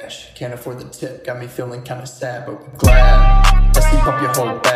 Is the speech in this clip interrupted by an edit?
no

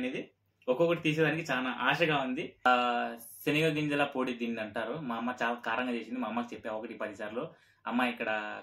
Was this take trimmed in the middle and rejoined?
yes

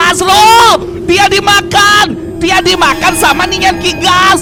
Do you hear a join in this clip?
no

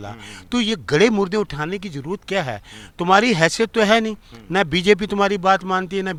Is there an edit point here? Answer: no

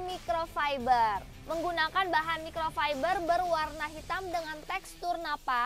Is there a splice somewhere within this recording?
yes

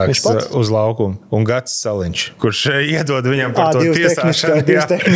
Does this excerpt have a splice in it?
yes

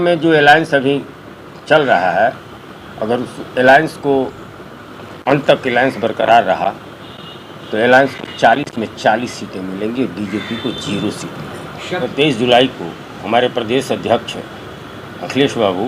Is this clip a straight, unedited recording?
no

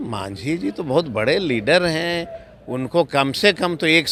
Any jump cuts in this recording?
no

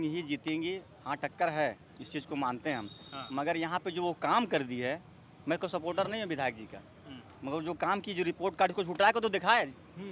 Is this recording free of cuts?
yes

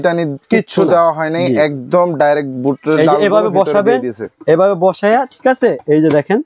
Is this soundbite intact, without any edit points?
yes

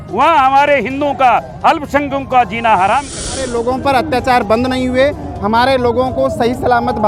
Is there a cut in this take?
yes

